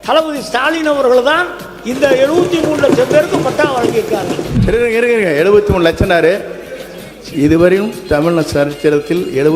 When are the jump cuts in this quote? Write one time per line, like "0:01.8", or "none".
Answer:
0:04.5